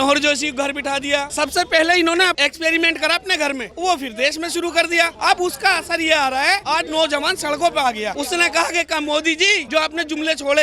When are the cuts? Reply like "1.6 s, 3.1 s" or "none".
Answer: 1.3 s, 2.4 s, 3.7 s, 5.1 s, 6.6 s, 8.1 s, 9.6 s